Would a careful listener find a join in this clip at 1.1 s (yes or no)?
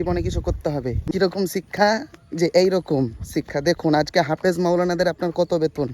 yes